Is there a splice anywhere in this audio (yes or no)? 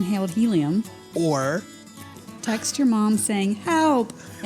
yes